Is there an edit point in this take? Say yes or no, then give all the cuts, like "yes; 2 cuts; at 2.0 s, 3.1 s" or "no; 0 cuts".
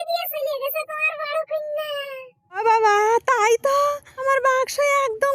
yes; 2 cuts; at 2.3 s, 4.1 s